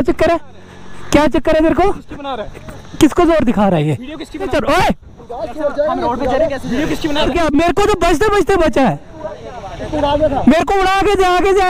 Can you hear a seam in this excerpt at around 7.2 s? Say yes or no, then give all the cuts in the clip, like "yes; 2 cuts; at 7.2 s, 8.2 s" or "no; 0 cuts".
yes; 2 cuts; at 4.3 s, 7.2 s